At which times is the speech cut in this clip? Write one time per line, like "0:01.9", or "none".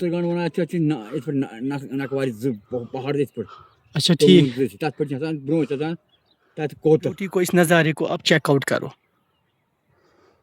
0:07.2